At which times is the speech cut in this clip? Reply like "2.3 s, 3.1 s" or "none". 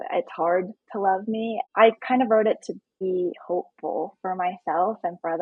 1.6 s, 3.0 s